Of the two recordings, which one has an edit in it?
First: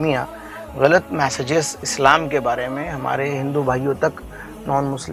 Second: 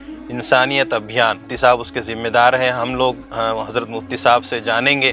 second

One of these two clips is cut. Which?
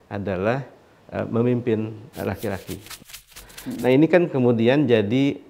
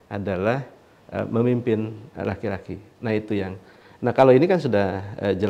first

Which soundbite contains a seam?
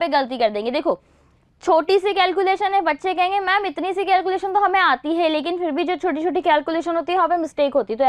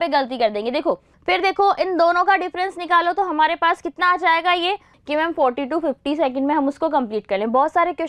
second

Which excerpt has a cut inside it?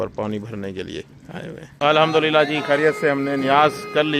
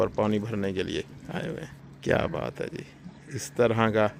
first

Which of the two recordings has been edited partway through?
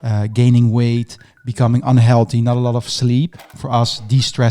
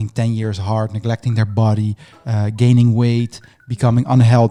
first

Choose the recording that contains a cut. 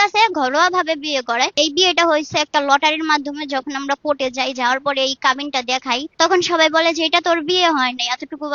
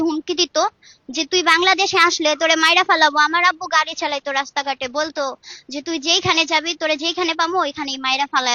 first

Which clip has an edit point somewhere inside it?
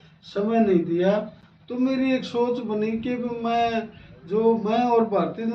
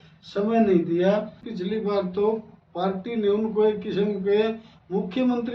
second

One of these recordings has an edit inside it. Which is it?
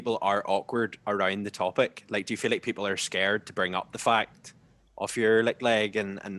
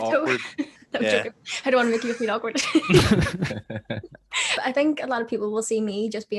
second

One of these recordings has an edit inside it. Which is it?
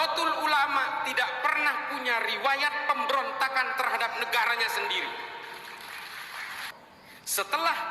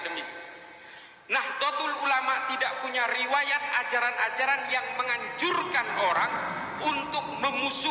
first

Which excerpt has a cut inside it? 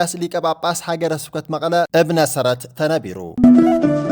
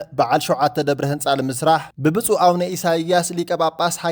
first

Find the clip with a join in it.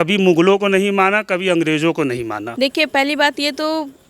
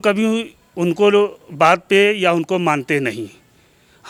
first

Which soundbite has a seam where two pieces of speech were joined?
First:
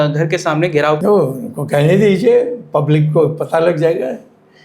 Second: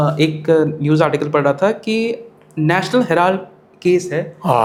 first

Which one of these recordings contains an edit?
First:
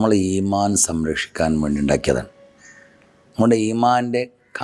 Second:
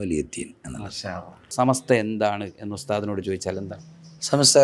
second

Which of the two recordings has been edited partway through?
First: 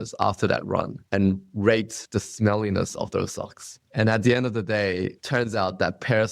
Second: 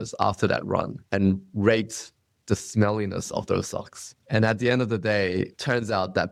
first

